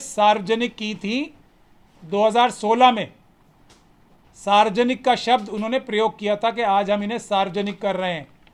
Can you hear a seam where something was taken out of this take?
no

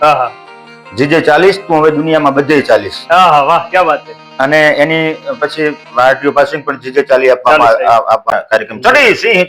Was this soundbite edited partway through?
yes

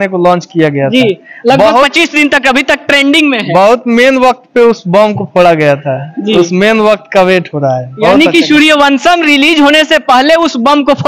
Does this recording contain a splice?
no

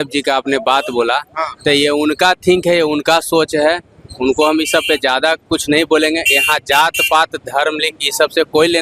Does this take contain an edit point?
no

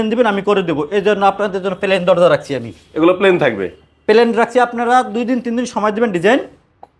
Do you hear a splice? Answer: no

